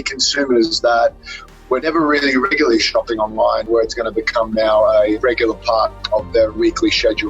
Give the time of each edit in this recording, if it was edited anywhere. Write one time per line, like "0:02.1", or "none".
0:01.8
0:03.7
0:05.2
0:06.6